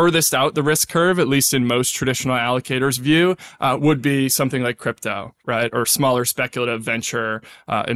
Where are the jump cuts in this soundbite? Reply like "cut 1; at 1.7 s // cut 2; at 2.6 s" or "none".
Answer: none